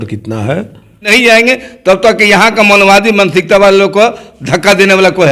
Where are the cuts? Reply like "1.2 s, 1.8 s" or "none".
1.0 s

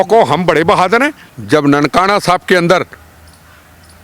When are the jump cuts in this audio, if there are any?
1.3 s

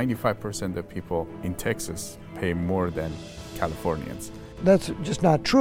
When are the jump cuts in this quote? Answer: 1.3 s, 4.6 s

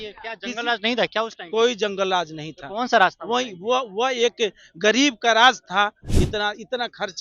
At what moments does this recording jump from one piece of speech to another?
6.1 s

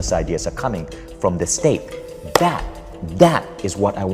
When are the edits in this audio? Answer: none

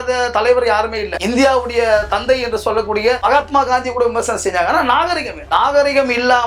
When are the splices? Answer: none

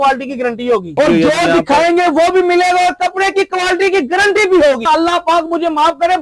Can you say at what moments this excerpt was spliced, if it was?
1.0 s, 4.8 s

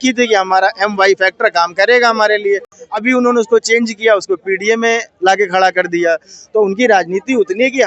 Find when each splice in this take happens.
none

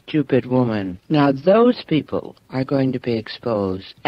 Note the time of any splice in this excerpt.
1.0 s, 2.4 s

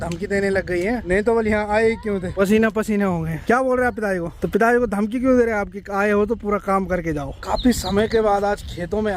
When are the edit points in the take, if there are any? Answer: 1.0 s, 2.3 s, 3.4 s, 4.3 s, 7.4 s

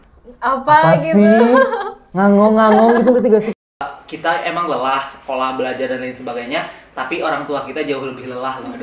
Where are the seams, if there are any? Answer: 3.5 s

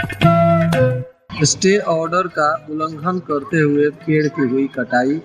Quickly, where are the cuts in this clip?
1.0 s

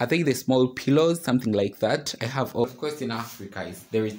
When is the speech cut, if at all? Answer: 2.6 s

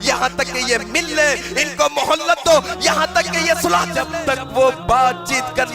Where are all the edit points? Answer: 4.0 s

